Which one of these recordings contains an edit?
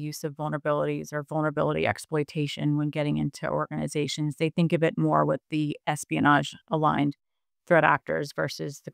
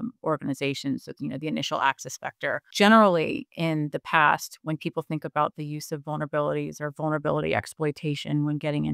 second; 1 cut; at 2.7 s

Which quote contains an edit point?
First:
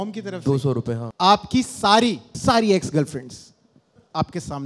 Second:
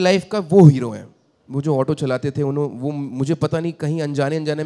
first; 3 cuts; at 1.1 s, 2.3 s, 3.8 s

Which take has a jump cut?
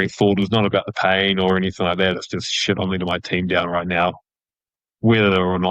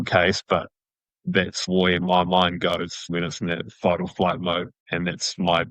second; 3 cuts; at 1.6 s, 3.1 s, 4.8 s

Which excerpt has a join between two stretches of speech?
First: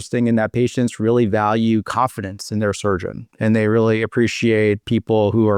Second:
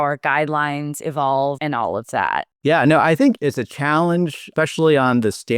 second; 2 cuts; at 3.4 s, 4.5 s

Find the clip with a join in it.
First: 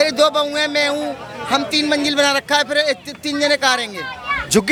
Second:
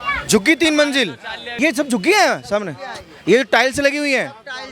second; 1 cut; at 1.6 s

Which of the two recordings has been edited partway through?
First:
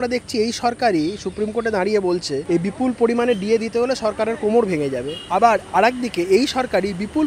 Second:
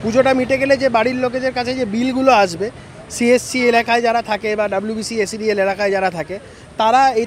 first; 2 cuts; at 2.4 s, 5.1 s

